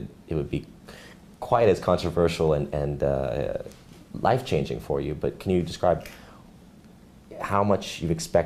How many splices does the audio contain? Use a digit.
0